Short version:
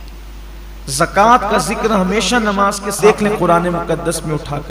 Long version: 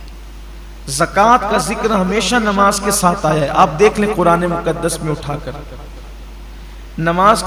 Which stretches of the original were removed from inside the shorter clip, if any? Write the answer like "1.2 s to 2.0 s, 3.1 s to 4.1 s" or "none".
3.0 s to 3.7 s